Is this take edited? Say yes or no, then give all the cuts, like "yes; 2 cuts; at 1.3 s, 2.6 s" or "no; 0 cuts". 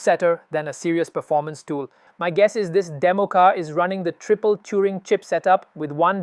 yes; 1 cut; at 2.1 s